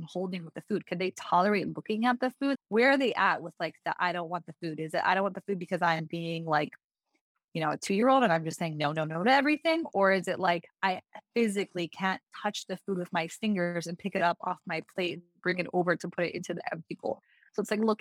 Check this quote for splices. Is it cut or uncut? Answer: cut